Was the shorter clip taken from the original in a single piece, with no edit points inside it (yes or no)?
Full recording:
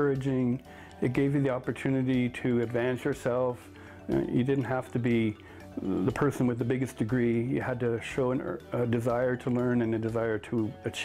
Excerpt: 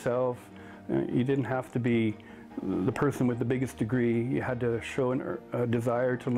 yes